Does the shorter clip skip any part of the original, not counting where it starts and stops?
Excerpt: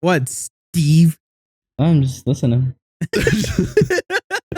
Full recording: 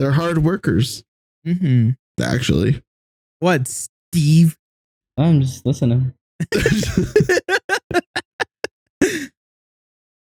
no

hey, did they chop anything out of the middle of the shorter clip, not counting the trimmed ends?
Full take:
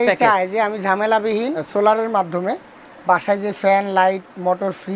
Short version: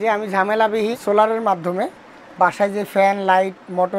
yes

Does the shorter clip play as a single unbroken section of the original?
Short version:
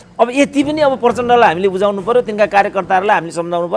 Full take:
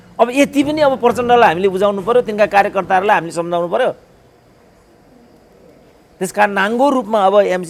yes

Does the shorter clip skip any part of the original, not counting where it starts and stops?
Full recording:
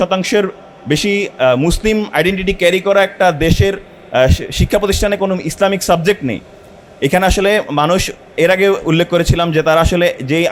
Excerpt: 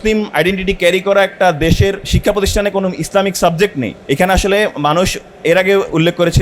yes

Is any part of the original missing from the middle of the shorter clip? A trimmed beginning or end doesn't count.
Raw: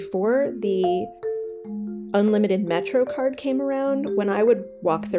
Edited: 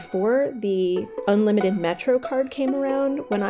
yes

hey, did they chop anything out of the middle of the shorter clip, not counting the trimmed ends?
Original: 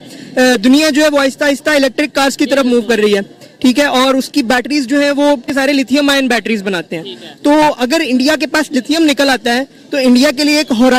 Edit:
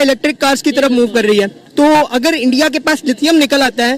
yes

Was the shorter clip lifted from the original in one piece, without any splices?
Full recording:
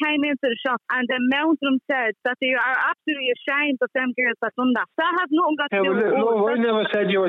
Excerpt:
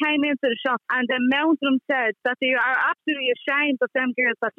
yes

